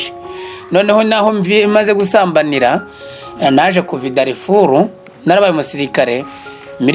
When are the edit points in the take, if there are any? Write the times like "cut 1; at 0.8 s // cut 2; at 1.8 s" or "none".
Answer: none